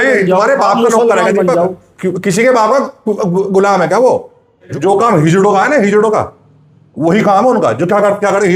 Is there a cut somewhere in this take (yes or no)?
yes